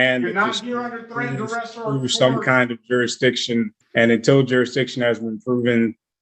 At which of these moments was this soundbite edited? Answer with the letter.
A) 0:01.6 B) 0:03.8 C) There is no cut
B